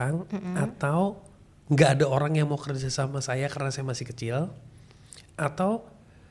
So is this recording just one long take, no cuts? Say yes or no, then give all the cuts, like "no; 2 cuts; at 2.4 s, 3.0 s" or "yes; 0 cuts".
yes; 0 cuts